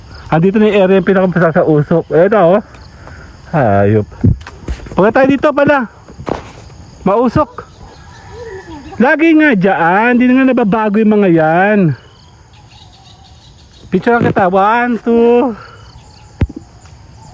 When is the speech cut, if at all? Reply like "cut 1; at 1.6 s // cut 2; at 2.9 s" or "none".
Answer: none